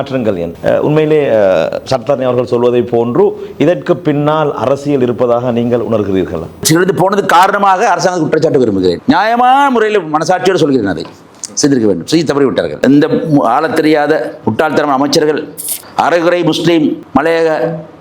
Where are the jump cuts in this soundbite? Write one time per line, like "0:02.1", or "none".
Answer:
0:06.6
0:12.7